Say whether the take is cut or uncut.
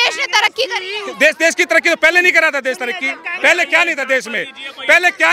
uncut